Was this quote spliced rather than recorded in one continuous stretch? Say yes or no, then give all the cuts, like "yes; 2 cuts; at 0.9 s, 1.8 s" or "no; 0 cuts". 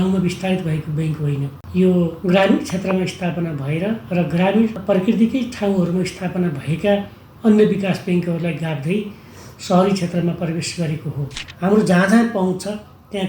yes; 4 cuts; at 1.6 s, 2.2 s, 4.8 s, 11.4 s